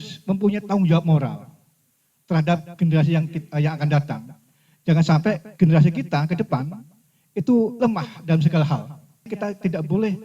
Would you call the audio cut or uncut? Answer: cut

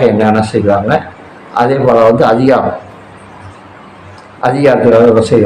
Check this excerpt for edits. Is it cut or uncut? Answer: uncut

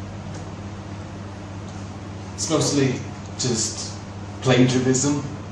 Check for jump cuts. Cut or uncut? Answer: uncut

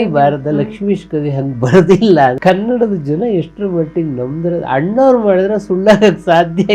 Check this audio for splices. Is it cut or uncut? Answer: cut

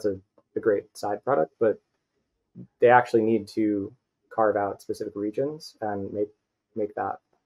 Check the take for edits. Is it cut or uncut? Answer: uncut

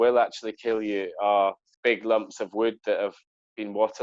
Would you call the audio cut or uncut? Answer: cut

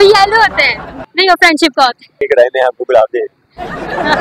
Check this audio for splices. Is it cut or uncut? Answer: cut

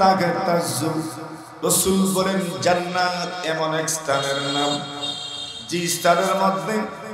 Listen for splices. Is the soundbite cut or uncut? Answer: uncut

